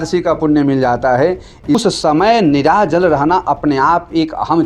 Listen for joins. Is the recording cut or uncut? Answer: cut